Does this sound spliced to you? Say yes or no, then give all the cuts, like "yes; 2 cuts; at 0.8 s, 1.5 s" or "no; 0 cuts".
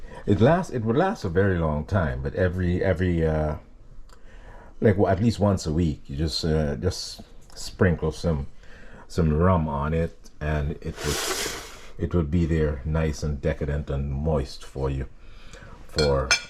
no; 0 cuts